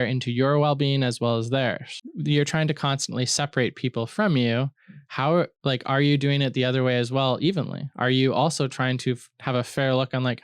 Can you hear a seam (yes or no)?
yes